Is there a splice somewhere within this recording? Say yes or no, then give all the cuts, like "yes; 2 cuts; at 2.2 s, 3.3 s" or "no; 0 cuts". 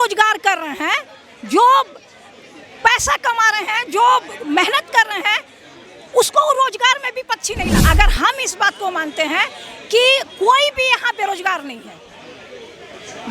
yes; 1 cut; at 7.8 s